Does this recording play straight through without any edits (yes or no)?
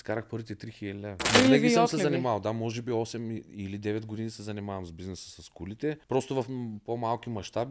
no